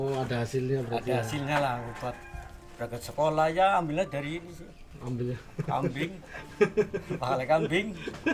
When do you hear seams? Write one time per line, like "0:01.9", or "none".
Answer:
none